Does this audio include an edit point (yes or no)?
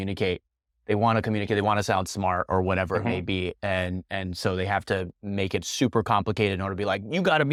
no